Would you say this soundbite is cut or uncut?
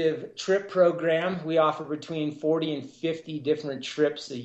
uncut